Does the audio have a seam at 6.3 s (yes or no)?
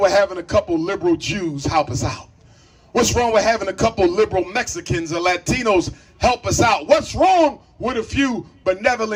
no